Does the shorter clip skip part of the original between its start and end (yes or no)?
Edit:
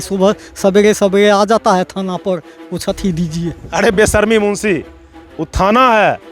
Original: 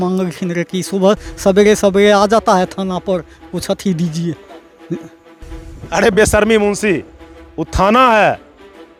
yes